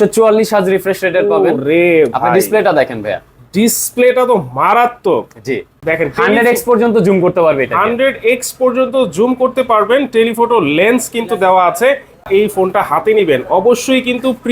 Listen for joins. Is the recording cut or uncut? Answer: cut